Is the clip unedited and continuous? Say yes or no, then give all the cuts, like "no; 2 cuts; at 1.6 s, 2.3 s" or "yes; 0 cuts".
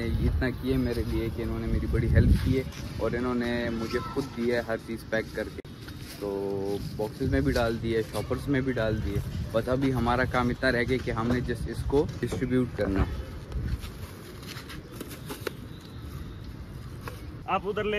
yes; 0 cuts